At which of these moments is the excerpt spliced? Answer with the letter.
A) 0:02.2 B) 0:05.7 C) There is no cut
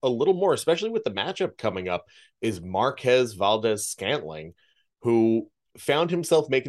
B